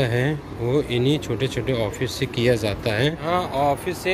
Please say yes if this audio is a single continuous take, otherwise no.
no